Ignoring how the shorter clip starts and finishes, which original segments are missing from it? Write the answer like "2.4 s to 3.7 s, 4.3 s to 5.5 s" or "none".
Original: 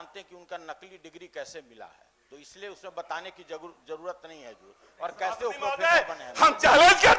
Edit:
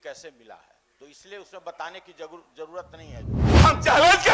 4.7 s to 6.2 s